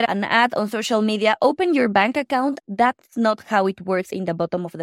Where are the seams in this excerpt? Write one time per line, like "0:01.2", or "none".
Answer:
0:02.6
0:04.1